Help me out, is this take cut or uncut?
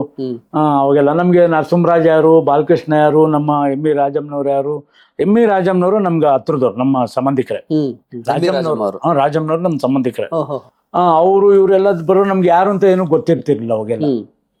uncut